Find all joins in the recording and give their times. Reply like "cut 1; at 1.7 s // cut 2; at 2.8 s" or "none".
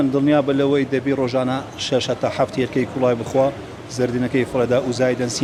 none